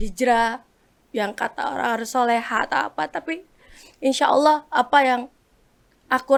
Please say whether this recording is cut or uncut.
uncut